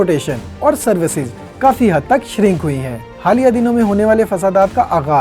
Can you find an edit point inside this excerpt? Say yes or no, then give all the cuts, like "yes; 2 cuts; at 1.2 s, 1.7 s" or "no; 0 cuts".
yes; 1 cut; at 3.1 s